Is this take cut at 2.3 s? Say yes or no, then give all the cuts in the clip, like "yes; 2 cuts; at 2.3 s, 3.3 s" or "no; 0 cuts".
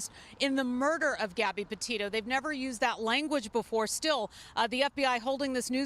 yes; 1 cut; at 2.3 s